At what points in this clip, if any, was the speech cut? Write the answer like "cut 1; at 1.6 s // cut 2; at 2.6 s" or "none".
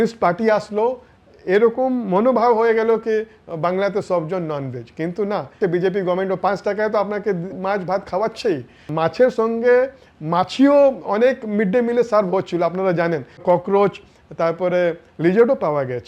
cut 1; at 5.6 s // cut 2; at 8.9 s // cut 3; at 13.4 s